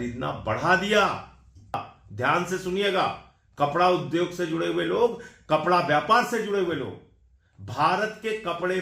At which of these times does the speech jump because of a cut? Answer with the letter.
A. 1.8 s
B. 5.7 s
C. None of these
A